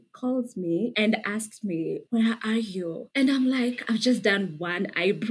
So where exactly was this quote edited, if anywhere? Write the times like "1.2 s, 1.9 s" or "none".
0.9 s